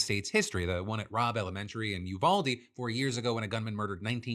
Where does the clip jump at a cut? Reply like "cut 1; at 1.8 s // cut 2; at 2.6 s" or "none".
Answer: cut 1; at 2.1 s